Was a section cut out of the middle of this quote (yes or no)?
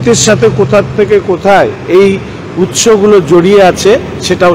no